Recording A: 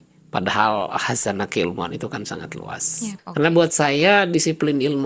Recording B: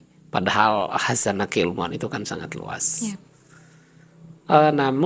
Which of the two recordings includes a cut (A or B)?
A